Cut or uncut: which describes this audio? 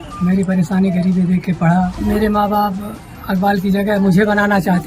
cut